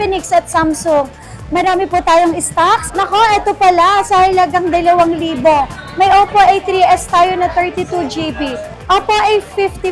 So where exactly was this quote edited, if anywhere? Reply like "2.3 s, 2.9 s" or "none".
2.9 s, 8.7 s